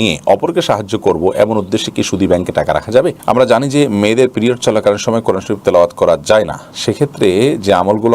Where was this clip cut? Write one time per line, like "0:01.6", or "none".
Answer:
0:03.1